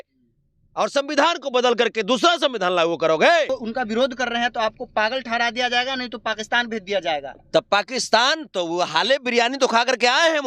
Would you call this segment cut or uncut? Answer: cut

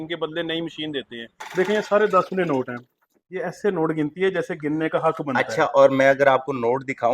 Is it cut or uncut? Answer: cut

